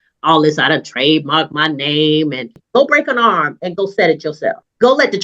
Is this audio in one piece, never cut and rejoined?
no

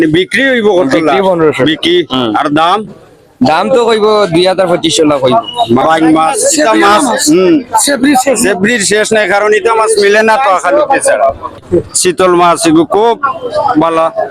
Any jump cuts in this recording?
yes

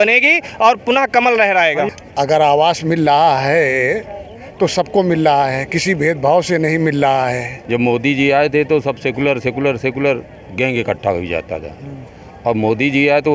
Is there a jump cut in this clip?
yes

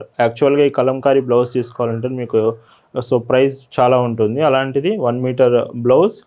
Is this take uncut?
yes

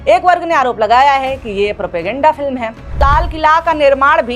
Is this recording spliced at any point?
yes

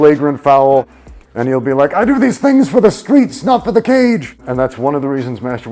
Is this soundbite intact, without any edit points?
no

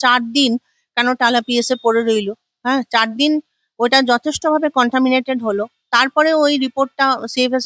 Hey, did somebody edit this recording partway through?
no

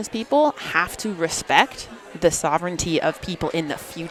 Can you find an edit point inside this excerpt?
no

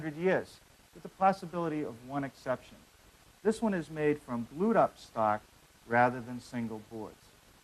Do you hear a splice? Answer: no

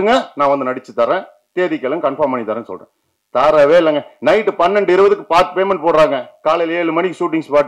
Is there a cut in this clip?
no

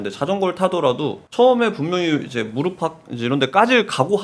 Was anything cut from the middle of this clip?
yes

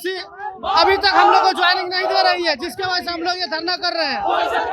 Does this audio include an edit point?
no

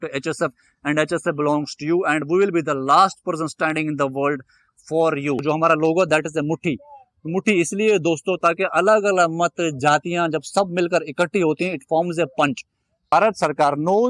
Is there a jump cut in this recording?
yes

